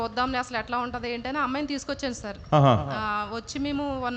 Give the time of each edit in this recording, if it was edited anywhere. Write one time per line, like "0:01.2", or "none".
none